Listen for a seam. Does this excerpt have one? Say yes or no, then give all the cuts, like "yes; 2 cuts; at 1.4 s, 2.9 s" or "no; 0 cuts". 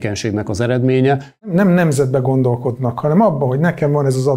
yes; 1 cut; at 1.5 s